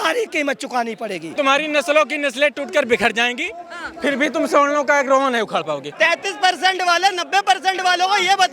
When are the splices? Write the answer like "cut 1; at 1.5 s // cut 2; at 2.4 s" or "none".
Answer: cut 1; at 1.3 s // cut 2; at 5.8 s